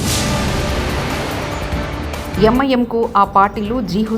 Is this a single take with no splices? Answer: no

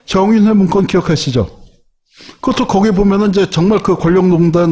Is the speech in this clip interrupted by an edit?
yes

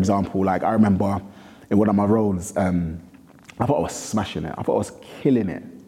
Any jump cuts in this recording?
no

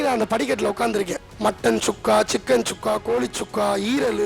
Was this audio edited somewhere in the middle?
no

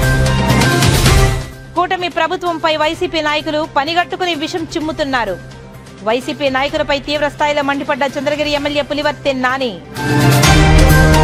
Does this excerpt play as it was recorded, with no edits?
yes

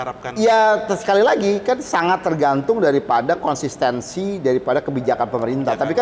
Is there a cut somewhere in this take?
no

